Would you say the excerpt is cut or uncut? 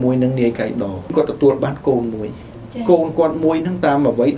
cut